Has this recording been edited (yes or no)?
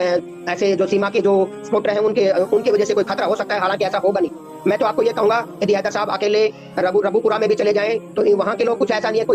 no